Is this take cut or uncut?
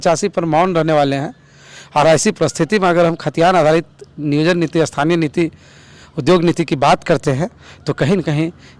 uncut